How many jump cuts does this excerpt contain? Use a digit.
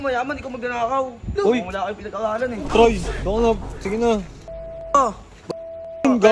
1